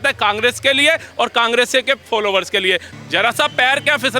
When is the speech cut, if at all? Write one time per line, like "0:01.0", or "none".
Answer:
0:02.9